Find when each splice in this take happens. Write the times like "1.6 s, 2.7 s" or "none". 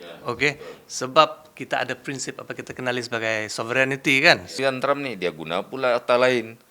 4.6 s

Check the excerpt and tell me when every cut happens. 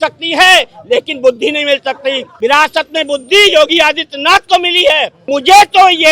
2.3 s, 5.2 s

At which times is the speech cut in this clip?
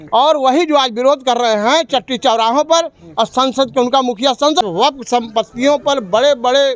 4.6 s

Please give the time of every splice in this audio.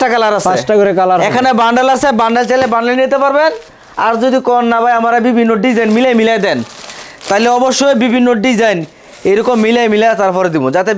none

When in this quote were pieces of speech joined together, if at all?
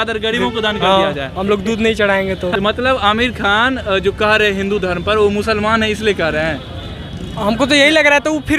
2.5 s

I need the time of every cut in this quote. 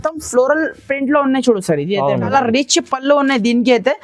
2.3 s

